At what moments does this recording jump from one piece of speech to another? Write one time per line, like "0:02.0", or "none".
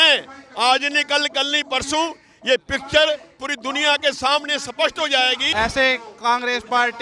0:05.4